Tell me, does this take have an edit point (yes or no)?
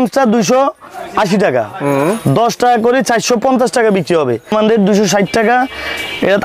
yes